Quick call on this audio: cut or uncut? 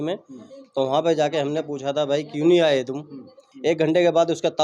cut